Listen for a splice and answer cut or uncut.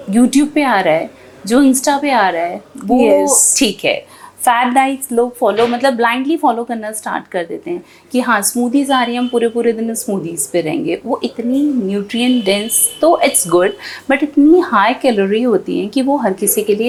uncut